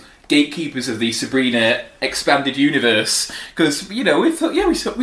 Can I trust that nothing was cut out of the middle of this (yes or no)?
yes